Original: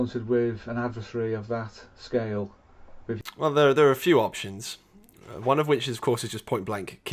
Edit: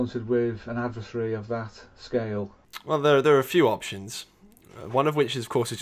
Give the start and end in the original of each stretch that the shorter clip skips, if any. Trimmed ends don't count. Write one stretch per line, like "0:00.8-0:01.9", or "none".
0:02.8-0:03.3